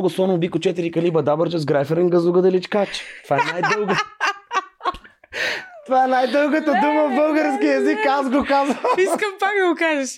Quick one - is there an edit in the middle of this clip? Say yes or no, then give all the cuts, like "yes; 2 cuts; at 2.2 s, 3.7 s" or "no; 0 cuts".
no; 0 cuts